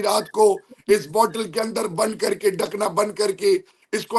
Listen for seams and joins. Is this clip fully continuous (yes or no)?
yes